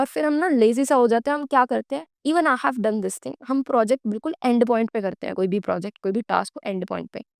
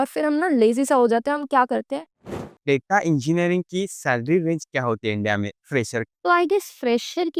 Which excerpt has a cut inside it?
second; 1 cut; at 2.2 s

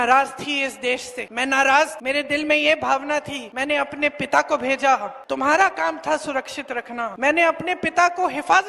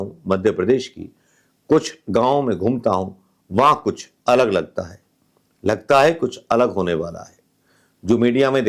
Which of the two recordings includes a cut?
first; 5 cuts; at 1.2 s, 2.0 s, 3.4 s, 5.1 s, 7.1 s

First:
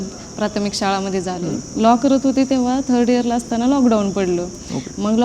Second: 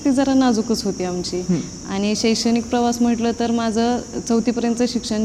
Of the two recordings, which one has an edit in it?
first; 1 cut; at 1.5 s

